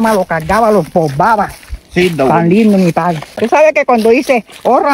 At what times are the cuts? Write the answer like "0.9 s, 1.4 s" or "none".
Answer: 3.3 s